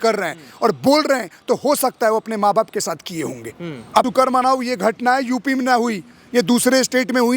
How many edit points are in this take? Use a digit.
1